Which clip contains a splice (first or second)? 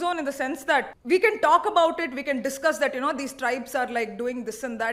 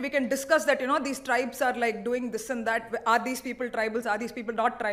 first